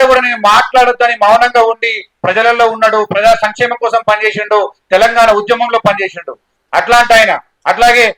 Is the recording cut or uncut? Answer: uncut